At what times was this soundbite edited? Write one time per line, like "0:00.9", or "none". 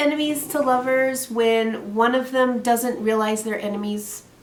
none